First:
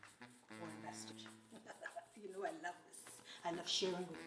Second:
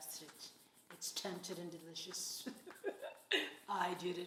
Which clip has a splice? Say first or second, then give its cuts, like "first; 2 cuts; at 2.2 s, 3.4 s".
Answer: first; 1 cut; at 1.3 s